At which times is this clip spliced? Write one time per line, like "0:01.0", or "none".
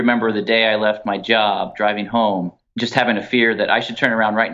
0:02.6